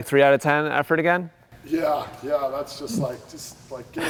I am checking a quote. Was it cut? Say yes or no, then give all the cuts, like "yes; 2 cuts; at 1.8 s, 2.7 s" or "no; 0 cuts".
no; 0 cuts